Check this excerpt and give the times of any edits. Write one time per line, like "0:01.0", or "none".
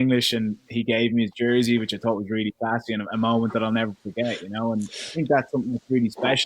none